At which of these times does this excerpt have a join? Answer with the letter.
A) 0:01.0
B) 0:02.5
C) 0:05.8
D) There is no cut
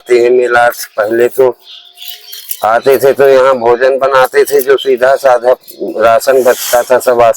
D